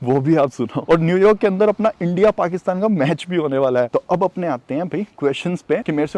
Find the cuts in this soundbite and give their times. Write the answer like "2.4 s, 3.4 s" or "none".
0.9 s, 3.9 s